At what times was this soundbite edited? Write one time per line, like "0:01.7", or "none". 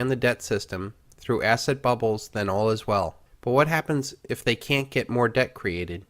0:04.9